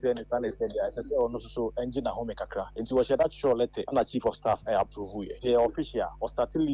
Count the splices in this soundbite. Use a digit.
1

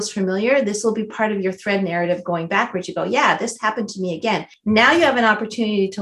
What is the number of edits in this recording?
1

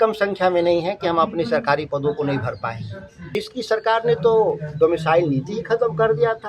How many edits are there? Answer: 1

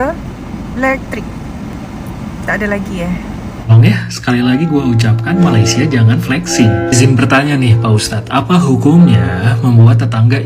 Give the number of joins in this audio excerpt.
1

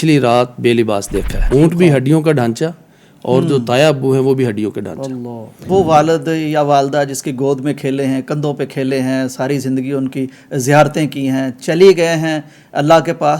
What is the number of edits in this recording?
2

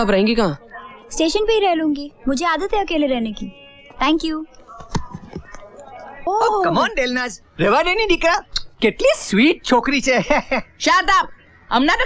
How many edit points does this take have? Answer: 1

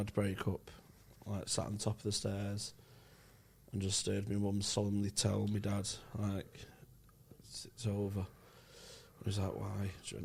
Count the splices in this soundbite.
0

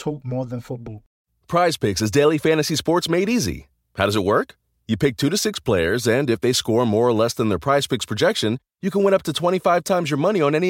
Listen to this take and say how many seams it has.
1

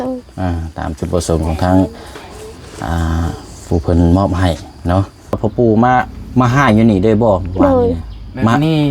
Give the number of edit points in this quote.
1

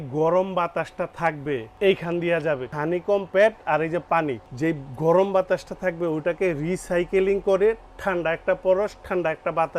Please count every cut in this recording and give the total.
3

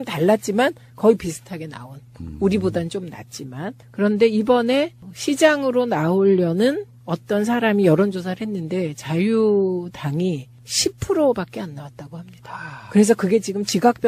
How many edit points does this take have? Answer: 0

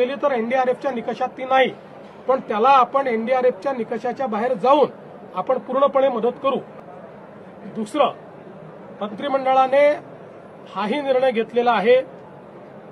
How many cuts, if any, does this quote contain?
1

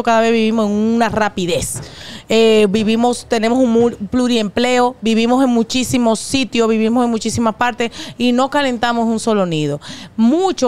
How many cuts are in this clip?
0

